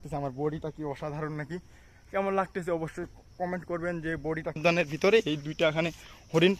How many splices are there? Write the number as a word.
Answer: one